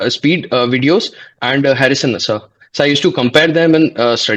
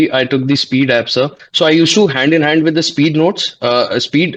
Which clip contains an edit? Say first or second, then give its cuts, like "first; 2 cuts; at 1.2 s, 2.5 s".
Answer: second; 1 cut; at 1.4 s